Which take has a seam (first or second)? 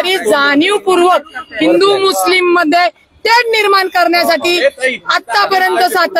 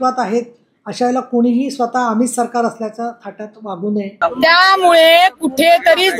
second